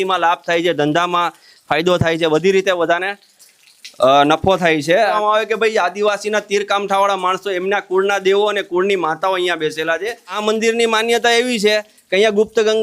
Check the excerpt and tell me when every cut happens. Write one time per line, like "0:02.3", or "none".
0:05.0
0:10.3